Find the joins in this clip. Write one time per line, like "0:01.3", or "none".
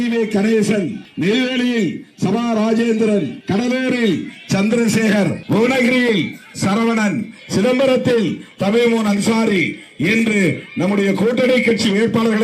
0:01.0
0:03.4
0:05.4